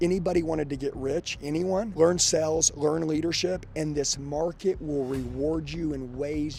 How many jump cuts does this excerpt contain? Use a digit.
0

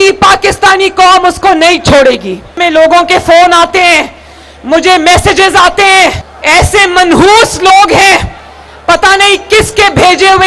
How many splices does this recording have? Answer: 2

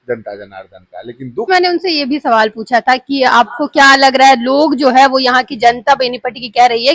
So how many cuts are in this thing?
1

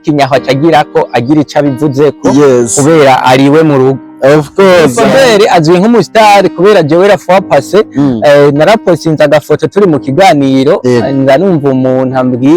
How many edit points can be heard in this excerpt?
1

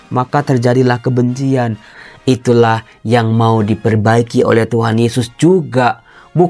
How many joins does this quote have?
1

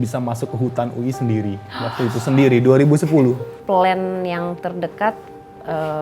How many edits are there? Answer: 1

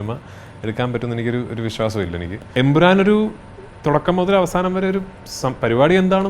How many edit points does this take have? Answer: 1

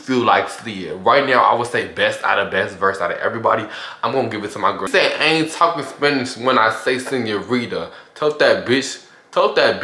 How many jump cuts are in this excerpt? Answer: 1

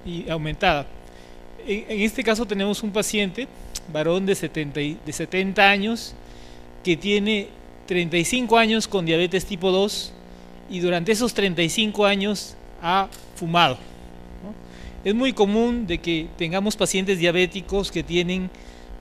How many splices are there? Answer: 0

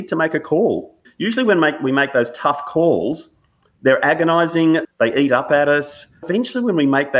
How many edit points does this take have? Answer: 3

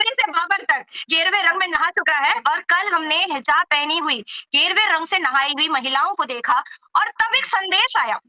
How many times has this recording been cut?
0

